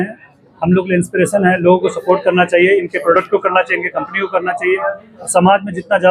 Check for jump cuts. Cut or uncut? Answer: uncut